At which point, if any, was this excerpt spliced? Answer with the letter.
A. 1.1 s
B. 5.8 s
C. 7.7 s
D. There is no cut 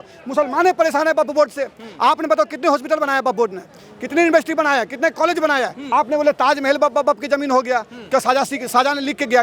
B